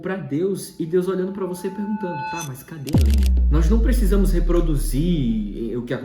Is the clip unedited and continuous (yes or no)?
yes